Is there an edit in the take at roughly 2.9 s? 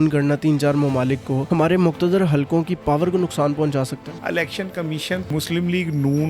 no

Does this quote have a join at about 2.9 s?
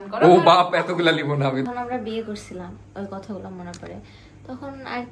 no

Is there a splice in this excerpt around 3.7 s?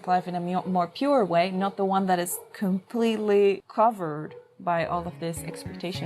yes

